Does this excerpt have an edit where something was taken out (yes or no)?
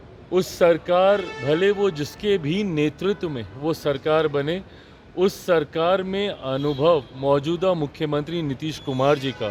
no